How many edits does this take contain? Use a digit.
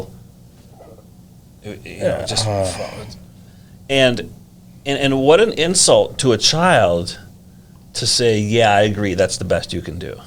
0